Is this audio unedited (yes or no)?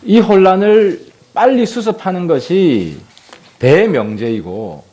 no